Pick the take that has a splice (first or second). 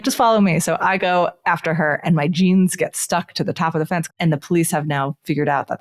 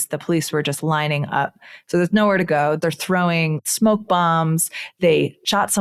first